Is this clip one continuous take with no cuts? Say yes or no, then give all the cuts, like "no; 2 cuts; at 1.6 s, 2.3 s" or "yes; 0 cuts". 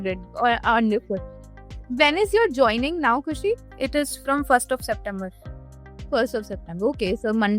no; 1 cut; at 3.7 s